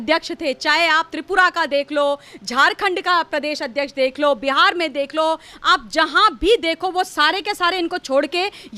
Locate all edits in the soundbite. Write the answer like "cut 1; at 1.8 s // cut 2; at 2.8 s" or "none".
none